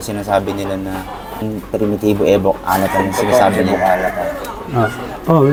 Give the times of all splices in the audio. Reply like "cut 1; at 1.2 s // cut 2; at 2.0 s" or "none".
none